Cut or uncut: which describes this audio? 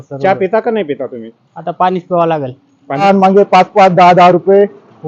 cut